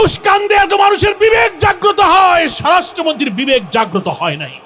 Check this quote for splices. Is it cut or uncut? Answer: uncut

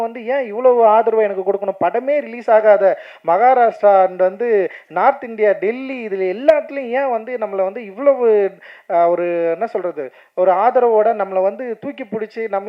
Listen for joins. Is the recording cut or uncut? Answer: uncut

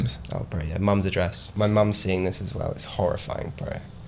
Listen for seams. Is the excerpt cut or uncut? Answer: cut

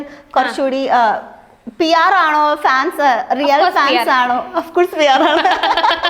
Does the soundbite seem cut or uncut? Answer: uncut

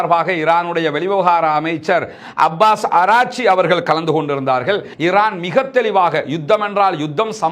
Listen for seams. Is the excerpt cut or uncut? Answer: cut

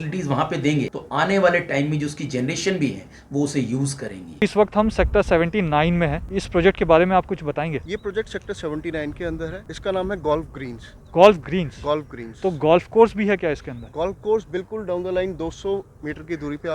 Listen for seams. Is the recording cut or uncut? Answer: cut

